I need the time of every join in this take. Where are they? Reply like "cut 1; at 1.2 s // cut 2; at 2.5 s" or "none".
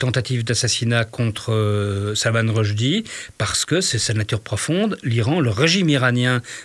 none

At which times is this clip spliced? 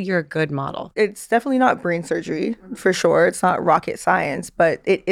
cut 1; at 0.9 s

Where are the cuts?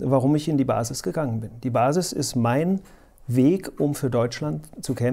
none

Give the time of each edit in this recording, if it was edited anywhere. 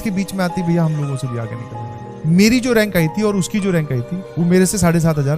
cut 1; at 2.2 s // cut 2; at 4.2 s

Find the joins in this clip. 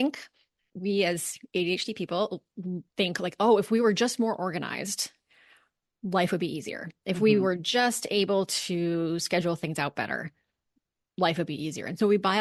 none

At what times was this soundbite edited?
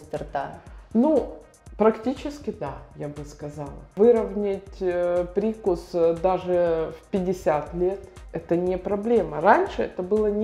none

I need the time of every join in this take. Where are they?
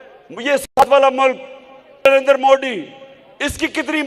cut 1; at 2.0 s

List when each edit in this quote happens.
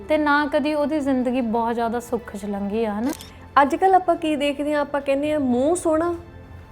cut 1; at 3.1 s

